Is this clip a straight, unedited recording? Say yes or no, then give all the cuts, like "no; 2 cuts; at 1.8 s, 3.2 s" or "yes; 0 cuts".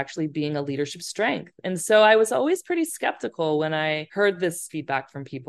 no; 2 cuts; at 4.1 s, 4.6 s